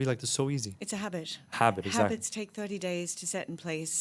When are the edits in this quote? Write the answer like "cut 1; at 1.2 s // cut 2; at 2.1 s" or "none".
none